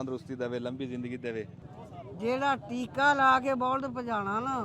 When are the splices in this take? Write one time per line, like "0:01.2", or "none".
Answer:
0:01.6

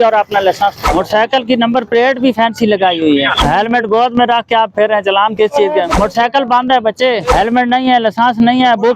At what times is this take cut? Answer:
0:00.8
0:03.4
0:05.9
0:07.3

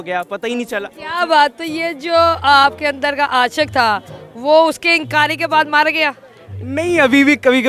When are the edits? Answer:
none

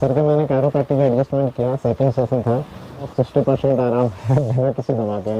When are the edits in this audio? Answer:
0:03.1

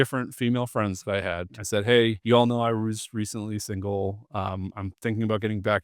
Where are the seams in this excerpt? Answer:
0:01.4
0:02.2

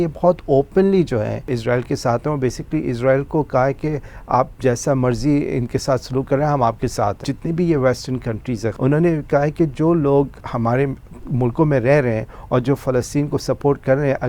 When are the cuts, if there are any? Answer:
0:01.5
0:07.2
0:08.8
0:10.4

